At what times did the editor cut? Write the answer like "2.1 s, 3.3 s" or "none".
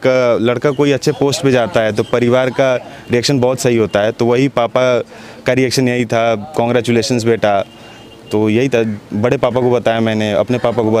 none